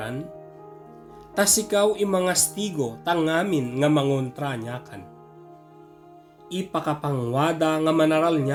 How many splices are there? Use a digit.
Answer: 0